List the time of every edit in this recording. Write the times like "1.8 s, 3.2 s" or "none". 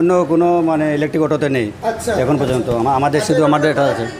none